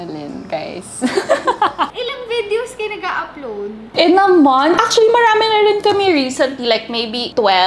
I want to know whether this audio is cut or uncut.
uncut